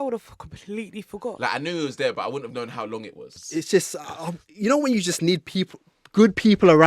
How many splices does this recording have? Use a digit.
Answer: 1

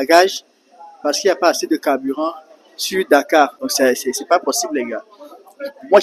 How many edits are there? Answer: 1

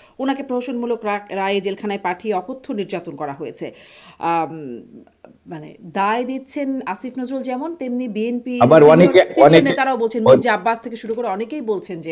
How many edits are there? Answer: 0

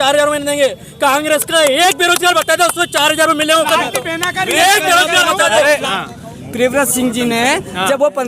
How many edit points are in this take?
1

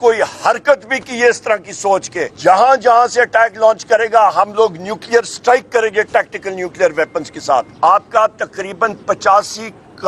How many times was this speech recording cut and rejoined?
2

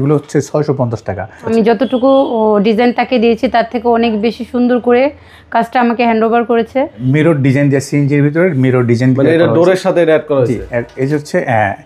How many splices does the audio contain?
2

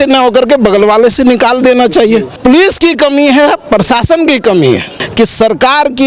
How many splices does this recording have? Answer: 2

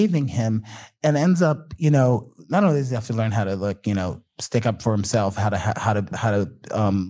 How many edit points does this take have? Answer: 1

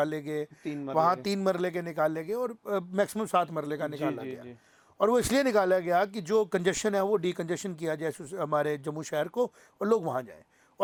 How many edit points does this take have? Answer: 0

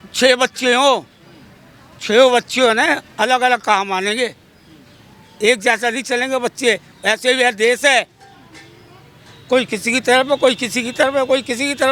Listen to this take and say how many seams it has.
0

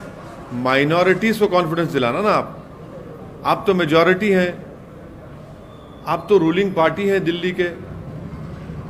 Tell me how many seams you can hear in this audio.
0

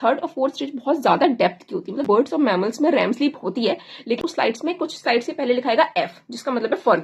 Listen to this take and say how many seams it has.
2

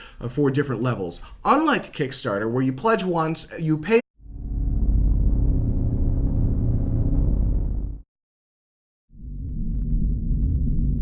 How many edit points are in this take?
0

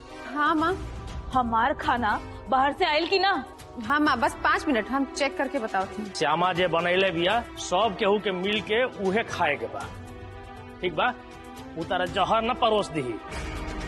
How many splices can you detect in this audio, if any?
2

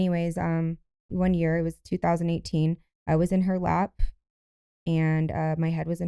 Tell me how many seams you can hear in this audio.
1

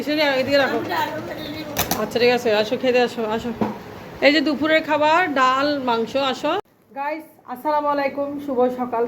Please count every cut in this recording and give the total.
1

